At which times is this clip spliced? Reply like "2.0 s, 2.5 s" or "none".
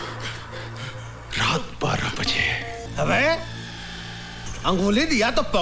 2.8 s